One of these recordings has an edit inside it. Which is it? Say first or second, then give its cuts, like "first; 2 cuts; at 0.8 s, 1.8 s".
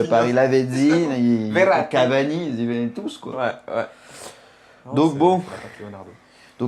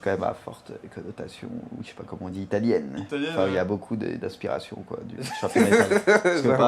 second; 1 cut; at 5.0 s